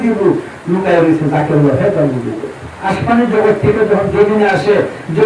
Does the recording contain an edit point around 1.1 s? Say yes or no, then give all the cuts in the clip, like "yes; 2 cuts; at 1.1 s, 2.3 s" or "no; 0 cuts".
no; 1 cut; at 2.7 s